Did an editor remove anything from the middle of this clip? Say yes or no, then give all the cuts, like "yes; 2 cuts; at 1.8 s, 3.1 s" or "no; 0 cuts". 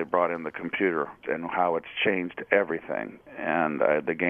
yes; 1 cut; at 1.2 s